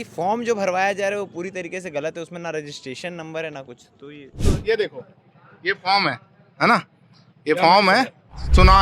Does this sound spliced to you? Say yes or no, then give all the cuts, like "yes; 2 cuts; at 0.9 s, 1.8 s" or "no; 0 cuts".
yes; 1 cut; at 4.5 s